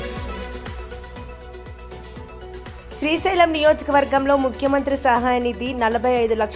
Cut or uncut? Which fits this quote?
cut